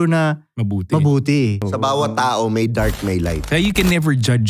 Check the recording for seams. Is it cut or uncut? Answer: cut